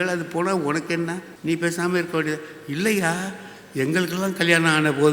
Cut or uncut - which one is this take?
cut